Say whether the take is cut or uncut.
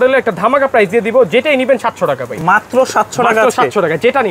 uncut